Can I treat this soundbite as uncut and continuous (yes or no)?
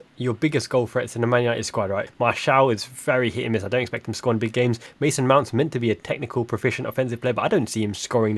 no